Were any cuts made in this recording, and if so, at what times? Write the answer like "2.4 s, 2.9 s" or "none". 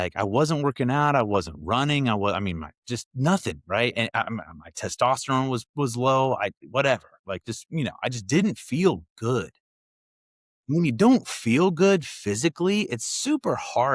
none